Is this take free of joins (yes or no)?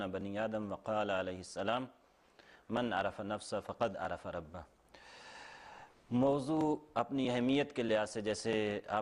no